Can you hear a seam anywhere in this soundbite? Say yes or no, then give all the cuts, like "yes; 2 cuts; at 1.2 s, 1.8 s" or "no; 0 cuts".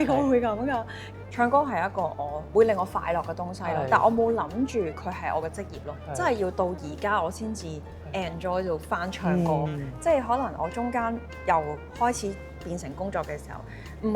no; 0 cuts